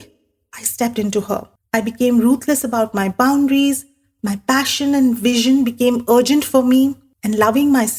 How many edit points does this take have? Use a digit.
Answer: 2